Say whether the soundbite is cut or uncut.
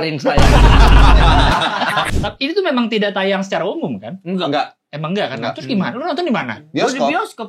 cut